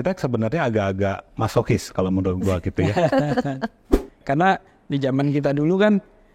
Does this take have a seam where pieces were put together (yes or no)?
yes